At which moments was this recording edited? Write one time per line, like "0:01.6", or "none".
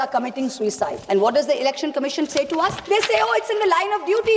0:01.0
0:02.8